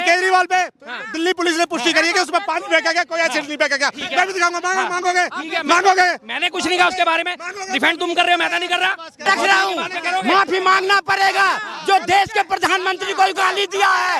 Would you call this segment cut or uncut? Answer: cut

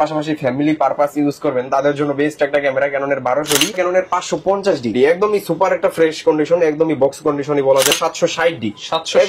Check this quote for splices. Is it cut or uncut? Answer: cut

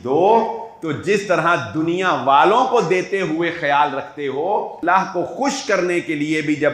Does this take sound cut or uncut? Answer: cut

